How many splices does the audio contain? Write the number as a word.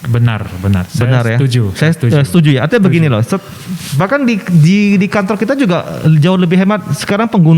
zero